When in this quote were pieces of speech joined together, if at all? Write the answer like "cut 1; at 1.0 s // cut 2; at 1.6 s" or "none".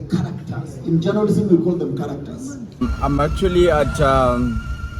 cut 1; at 2.8 s